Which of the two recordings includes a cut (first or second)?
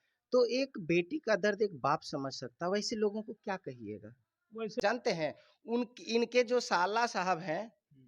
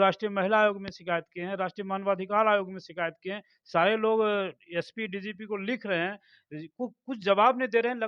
first